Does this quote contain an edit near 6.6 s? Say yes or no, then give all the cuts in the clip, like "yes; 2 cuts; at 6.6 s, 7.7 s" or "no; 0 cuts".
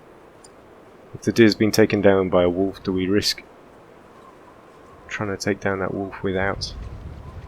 yes; 1 cut; at 6.6 s